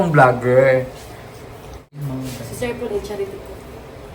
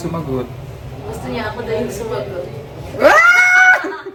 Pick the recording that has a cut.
first; 1 cut; at 2.0 s

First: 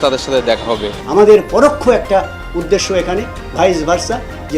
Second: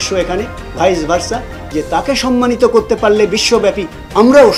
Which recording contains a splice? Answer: first; 1 cut; at 1.0 s

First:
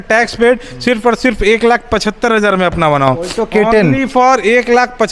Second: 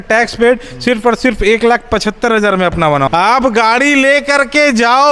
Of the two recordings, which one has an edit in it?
second; 1 cut; at 3.1 s

